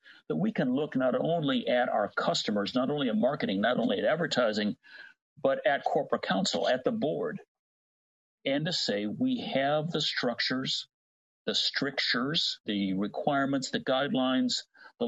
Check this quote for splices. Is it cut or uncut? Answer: cut